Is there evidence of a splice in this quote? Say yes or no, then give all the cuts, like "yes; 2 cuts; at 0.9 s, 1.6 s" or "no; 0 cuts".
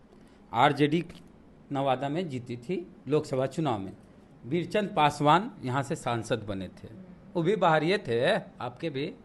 no; 0 cuts